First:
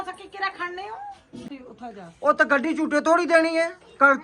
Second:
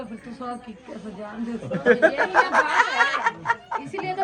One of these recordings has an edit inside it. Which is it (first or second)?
first